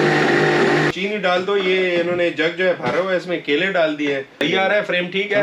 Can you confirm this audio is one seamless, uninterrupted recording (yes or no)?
no